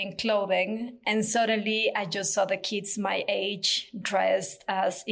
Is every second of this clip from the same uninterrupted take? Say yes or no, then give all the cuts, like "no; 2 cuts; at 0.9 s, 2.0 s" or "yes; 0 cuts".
yes; 0 cuts